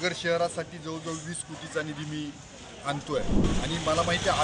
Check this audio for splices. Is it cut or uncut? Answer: cut